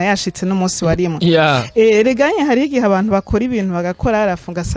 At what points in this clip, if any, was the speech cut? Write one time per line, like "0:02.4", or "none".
none